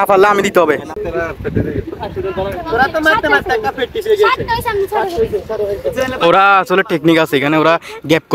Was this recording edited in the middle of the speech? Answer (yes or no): yes